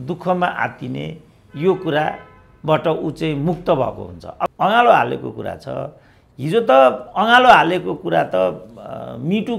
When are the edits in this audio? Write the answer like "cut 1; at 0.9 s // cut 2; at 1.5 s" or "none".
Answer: cut 1; at 4.5 s